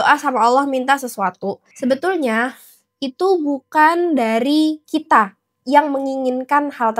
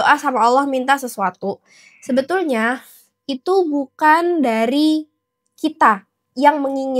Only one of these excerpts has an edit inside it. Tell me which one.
first; 2 cuts; at 1.7 s, 4.8 s

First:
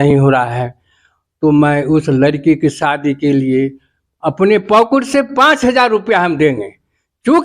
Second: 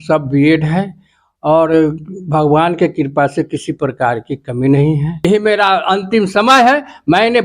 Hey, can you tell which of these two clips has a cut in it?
second; 1 cut; at 5.3 s

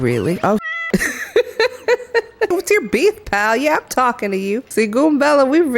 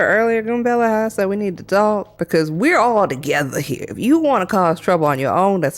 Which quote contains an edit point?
first; 2 cuts; at 2.5 s, 4.7 s

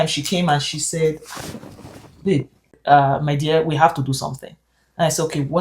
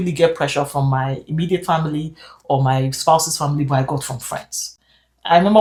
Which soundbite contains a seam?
first; 1 cut; at 2.8 s

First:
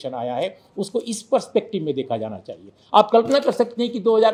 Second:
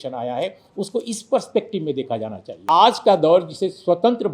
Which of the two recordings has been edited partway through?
second; 1 cut; at 2.6 s

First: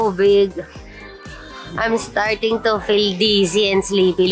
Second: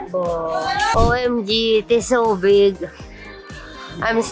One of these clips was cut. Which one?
second; 1 cut; at 0.9 s

